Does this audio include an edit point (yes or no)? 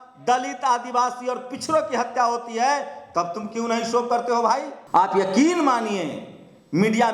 yes